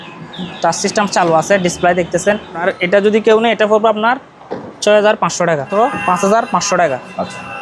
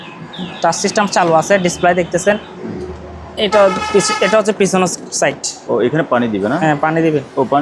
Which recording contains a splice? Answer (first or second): first